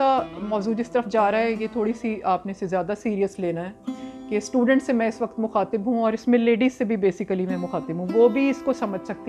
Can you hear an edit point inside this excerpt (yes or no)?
no